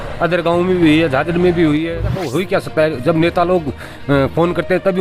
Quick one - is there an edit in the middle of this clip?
yes; 1 cut; at 2.3 s

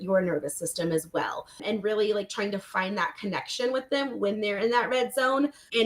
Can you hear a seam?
yes; 1 cut; at 1.6 s

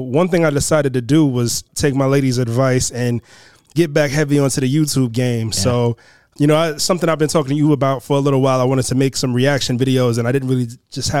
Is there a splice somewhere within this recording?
yes; 2 cuts; at 1.7 s, 6.3 s

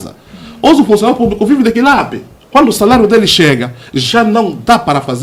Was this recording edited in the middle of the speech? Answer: no; 0 cuts

